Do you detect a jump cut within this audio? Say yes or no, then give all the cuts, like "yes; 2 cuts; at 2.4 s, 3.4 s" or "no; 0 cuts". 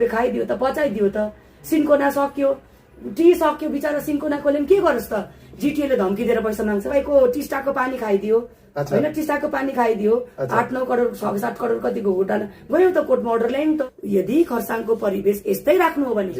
yes; 2 cuts; at 6.9 s, 13.9 s